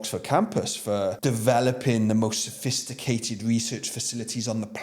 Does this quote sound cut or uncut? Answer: cut